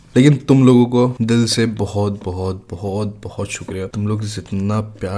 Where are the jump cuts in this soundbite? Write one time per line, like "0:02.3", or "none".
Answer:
0:01.2
0:03.9